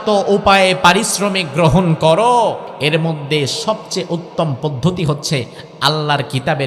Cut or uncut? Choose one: cut